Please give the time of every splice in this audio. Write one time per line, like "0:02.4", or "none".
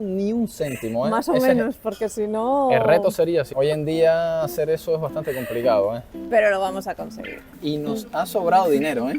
0:03.5
0:07.5